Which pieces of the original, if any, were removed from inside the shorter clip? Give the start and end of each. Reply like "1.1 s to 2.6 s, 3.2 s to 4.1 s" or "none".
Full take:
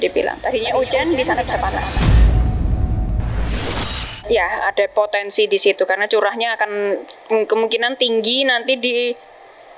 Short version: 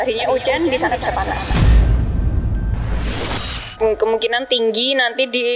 4.1 s to 7.1 s